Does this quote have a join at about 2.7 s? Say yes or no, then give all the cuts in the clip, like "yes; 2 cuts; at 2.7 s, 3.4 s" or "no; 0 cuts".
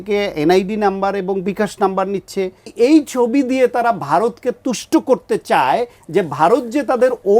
yes; 1 cut; at 2.7 s